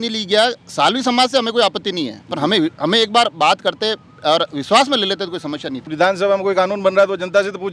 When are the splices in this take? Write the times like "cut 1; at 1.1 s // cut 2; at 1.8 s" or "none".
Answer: cut 1; at 5.9 s